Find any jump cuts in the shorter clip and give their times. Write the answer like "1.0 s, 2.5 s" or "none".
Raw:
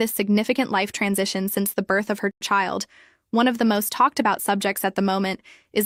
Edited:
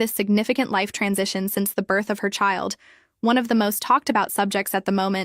2.3 s